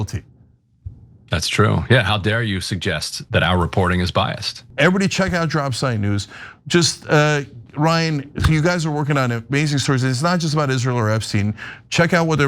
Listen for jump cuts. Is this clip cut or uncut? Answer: cut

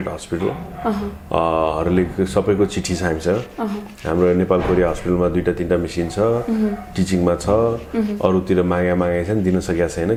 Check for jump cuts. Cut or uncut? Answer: uncut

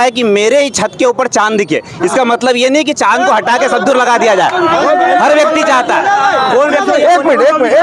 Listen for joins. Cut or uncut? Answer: uncut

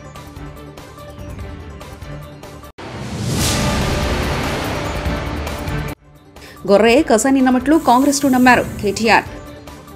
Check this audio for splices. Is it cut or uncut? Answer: cut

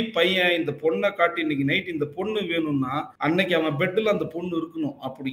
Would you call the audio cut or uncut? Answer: cut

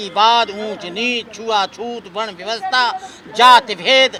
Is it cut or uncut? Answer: uncut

